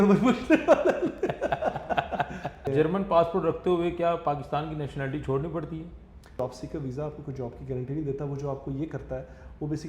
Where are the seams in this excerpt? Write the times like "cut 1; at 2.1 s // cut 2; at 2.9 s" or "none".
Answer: cut 1; at 2.6 s // cut 2; at 6.4 s

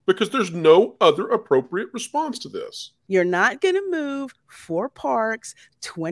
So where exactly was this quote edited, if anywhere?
cut 1; at 3.0 s

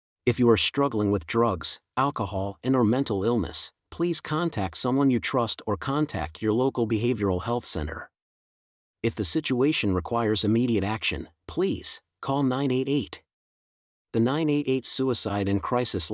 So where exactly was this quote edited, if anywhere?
none

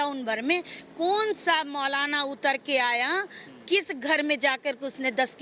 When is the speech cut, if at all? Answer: none

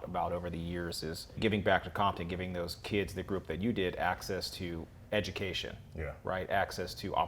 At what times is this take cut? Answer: cut 1; at 1.4 s // cut 2; at 2.8 s

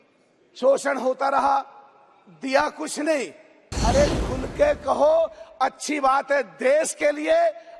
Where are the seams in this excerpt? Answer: cut 1; at 3.6 s

